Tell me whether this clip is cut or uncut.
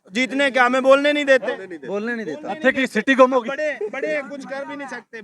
uncut